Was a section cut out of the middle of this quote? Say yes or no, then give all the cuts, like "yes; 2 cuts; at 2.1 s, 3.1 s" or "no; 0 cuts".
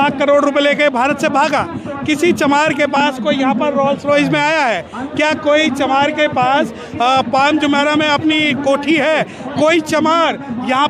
no; 0 cuts